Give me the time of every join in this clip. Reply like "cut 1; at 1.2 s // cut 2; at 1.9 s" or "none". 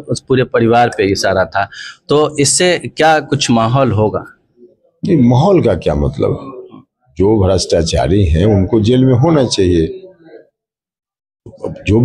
none